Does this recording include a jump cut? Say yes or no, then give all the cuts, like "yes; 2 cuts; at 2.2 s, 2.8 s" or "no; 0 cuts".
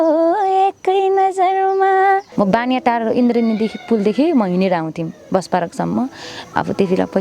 yes; 1 cut; at 2.3 s